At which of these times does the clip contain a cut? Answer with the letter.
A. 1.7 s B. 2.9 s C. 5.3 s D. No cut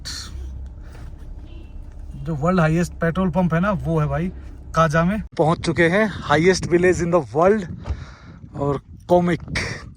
C